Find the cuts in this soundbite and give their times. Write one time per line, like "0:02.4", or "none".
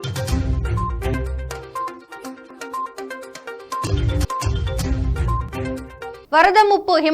0:06.0